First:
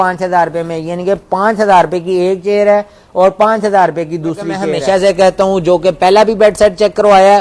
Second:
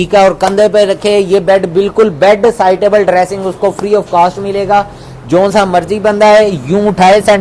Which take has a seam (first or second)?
first